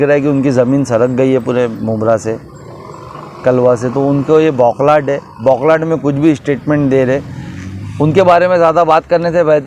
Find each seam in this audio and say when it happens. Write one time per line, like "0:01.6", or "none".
none